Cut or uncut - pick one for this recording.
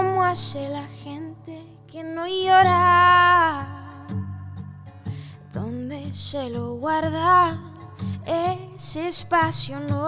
uncut